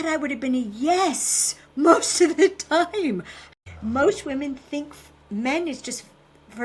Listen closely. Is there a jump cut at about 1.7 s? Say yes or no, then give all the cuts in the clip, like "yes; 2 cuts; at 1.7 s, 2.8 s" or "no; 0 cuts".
no; 1 cut; at 3.4 s